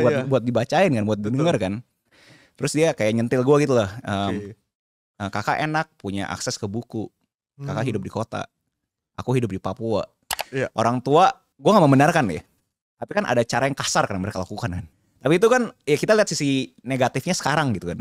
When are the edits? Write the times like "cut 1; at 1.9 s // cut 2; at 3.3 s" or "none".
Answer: cut 1; at 10.4 s // cut 2; at 11.5 s // cut 3; at 14.8 s